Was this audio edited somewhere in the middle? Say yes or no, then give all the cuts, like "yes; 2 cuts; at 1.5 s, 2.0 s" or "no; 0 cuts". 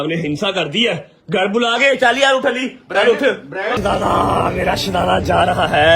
yes; 1 cut; at 3.7 s